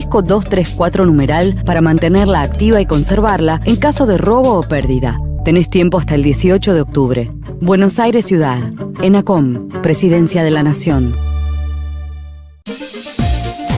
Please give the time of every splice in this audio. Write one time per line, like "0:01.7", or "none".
0:12.6